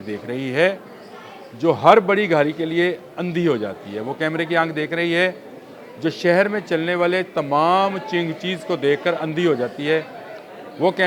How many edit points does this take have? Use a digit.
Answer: 0